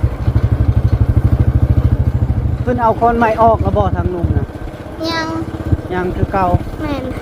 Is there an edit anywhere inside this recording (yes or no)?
yes